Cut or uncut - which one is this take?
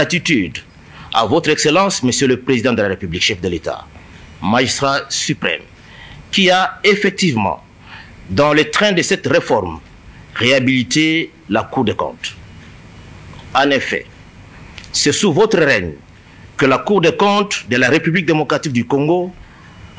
uncut